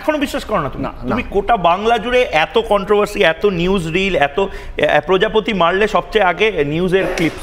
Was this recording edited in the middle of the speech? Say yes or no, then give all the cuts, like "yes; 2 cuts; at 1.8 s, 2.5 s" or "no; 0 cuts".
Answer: no; 0 cuts